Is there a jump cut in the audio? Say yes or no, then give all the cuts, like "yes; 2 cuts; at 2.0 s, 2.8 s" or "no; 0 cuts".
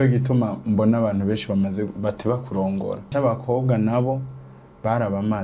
yes; 1 cut; at 3.1 s